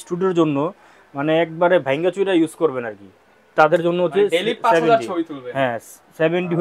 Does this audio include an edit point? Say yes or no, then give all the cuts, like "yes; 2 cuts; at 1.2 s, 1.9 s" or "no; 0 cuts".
no; 0 cuts